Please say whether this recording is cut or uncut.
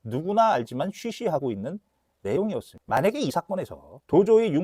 uncut